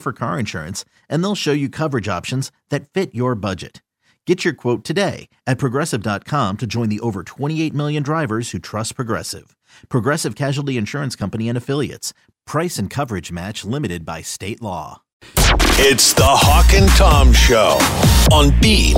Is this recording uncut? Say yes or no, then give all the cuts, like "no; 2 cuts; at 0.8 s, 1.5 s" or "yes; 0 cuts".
no; 1 cut; at 15.3 s